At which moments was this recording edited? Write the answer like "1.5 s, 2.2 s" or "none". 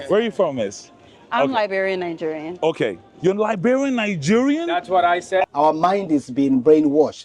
5.4 s